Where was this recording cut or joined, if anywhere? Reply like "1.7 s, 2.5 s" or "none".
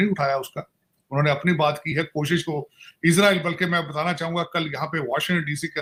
none